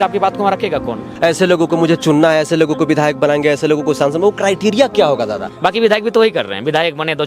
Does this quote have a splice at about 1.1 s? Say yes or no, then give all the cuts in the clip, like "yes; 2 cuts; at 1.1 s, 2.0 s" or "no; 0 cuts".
yes; 2 cuts; at 1.1 s, 5.4 s